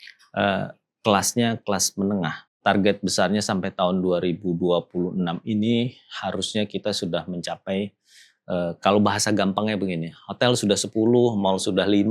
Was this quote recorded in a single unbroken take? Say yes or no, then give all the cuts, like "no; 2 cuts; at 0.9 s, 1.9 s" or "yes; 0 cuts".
no; 1 cut; at 2.6 s